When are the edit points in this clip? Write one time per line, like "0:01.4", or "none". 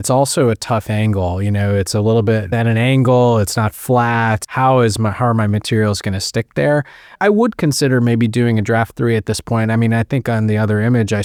none